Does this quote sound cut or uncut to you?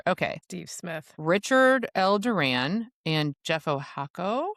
uncut